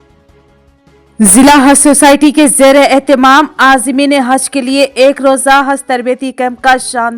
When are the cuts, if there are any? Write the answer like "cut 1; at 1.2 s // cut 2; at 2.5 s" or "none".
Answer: cut 1; at 0.9 s